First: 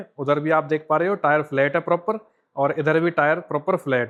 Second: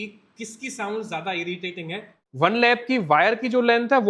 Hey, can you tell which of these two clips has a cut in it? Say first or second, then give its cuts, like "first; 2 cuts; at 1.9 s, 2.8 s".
second; 1 cut; at 2.2 s